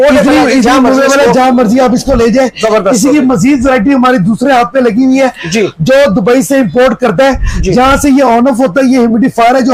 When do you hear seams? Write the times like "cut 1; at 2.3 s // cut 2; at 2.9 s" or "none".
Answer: none